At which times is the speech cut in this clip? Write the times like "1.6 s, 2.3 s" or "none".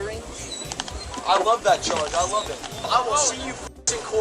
2.9 s